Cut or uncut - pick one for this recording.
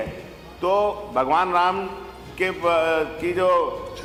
uncut